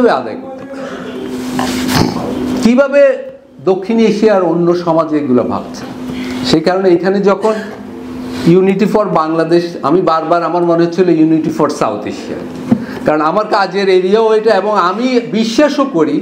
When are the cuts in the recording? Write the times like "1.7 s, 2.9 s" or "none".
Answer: none